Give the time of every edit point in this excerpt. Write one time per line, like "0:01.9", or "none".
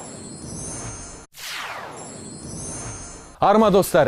none